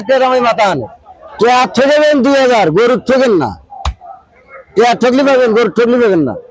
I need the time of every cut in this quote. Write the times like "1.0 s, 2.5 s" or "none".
1.3 s